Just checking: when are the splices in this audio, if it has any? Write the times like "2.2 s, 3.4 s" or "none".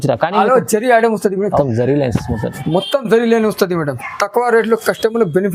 1.6 s